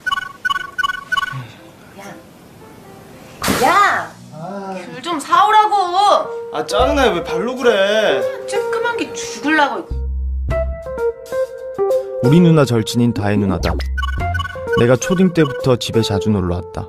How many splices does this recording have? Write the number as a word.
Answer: zero